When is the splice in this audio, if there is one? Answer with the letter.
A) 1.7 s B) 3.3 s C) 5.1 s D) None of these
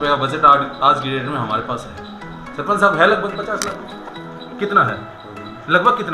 D